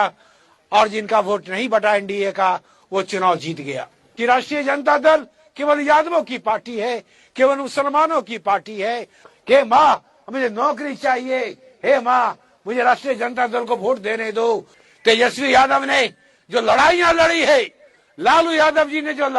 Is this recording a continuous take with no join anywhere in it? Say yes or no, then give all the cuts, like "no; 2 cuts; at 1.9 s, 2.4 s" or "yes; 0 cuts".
no; 3 cuts; at 4.0 s, 9.3 s, 14.8 s